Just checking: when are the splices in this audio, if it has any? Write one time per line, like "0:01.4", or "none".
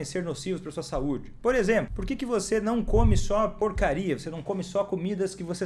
0:02.0
0:03.5